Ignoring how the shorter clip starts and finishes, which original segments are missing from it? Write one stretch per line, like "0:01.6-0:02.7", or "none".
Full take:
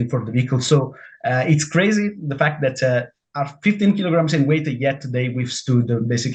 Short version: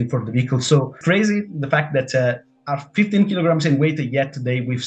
0:01.0-0:01.7